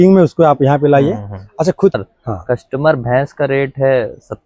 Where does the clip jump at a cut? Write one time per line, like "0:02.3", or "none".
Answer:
0:02.0